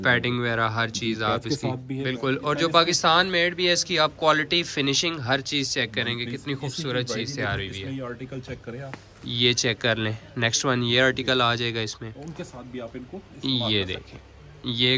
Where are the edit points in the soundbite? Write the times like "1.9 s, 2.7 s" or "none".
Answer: 2.0 s, 12.1 s